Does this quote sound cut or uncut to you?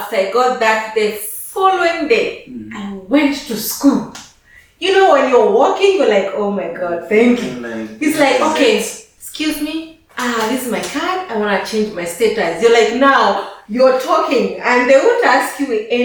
uncut